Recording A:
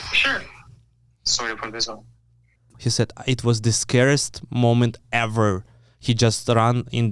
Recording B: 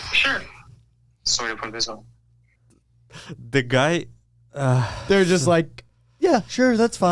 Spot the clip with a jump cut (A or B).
A